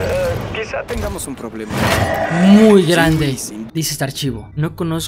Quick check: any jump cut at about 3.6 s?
yes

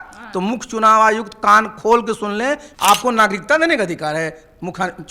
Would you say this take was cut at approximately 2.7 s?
yes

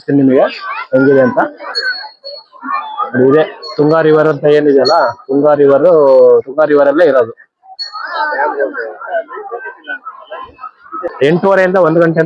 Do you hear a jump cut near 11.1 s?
yes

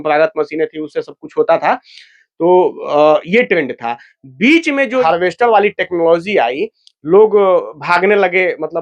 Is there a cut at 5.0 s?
yes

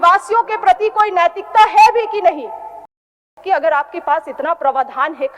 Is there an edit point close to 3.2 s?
yes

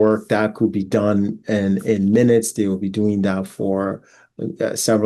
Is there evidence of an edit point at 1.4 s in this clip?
no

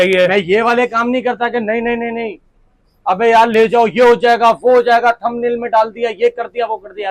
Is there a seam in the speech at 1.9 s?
no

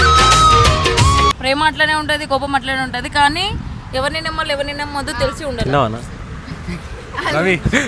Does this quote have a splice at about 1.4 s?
no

